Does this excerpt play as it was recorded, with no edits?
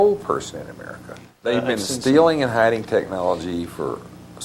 no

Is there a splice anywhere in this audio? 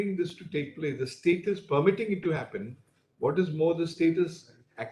no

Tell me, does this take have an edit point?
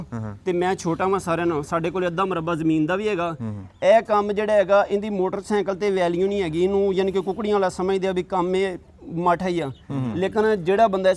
no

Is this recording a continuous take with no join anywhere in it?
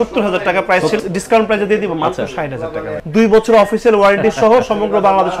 no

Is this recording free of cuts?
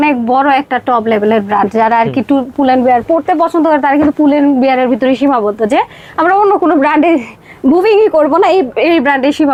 yes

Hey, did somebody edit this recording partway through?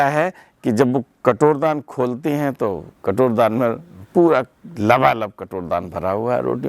no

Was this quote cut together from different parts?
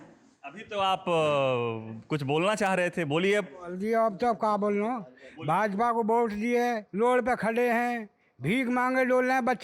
no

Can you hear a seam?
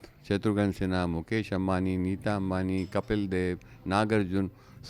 no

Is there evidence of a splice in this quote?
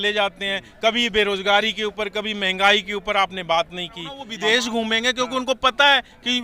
yes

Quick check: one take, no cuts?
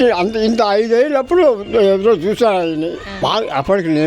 no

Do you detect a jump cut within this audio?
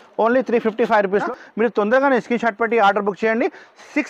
yes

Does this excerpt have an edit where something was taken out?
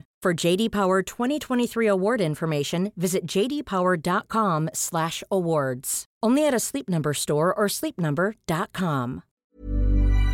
yes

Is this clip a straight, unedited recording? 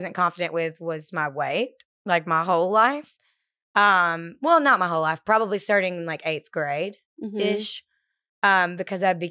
yes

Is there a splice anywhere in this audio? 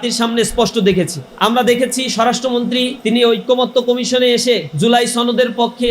yes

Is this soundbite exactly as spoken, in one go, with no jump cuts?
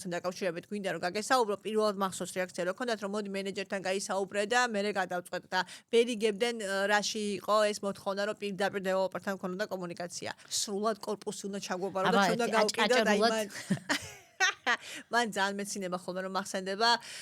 no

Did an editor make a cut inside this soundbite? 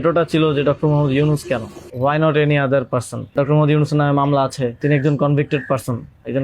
yes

